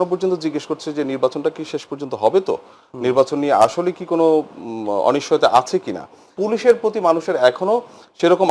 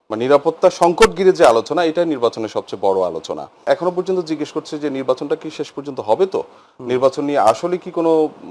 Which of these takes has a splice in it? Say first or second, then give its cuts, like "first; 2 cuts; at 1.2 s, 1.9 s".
first; 1 cut; at 6.3 s